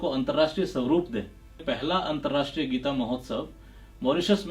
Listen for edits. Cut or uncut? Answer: cut